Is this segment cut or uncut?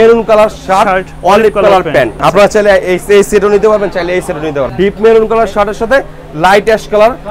cut